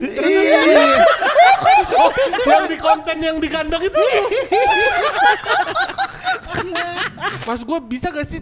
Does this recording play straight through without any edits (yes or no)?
no